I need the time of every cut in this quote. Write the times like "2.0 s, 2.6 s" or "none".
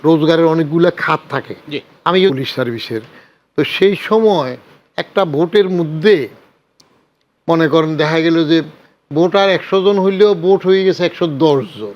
2.3 s

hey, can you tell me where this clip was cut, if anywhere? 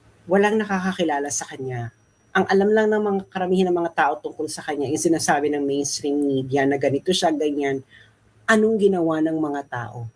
none

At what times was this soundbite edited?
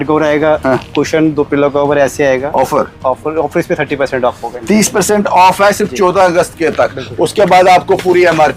none

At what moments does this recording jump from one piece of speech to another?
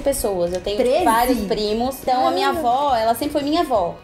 none

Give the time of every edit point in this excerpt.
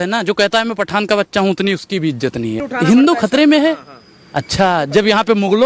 2.7 s

